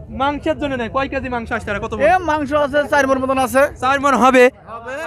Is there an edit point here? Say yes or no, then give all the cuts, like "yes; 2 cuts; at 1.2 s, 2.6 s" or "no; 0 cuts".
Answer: no; 0 cuts